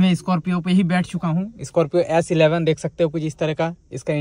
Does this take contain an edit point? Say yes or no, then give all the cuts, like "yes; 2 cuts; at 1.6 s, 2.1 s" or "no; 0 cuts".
no; 0 cuts